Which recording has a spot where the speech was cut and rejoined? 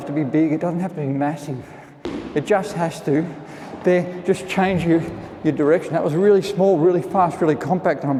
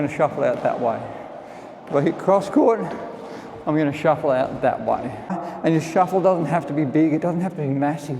second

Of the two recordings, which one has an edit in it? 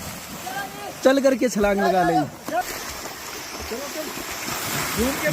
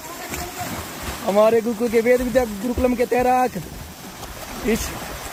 first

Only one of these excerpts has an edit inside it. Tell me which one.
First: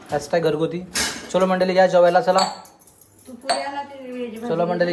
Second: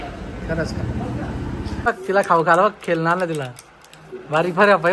second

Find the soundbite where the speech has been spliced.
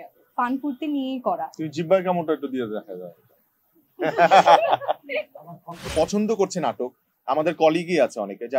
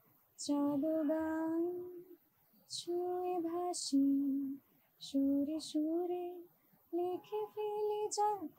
first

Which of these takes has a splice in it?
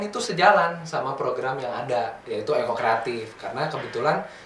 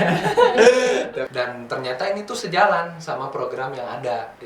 second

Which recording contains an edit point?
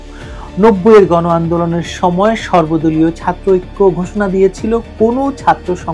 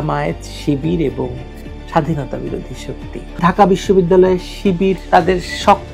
second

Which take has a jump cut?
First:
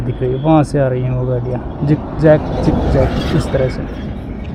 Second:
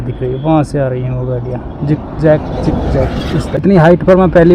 second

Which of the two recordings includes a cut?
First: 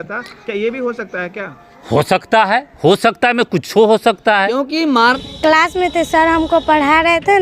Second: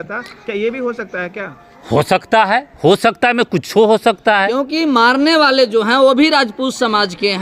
first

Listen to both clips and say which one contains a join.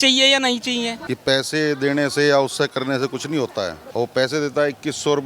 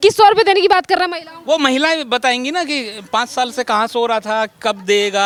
first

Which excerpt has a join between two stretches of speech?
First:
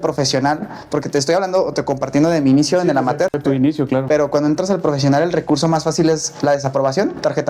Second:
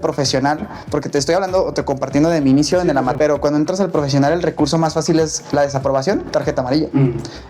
second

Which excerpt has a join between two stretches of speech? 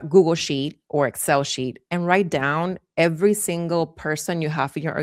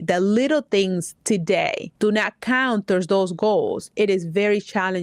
second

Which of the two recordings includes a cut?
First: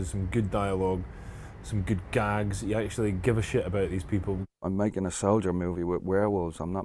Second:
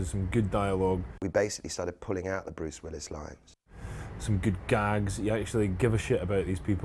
first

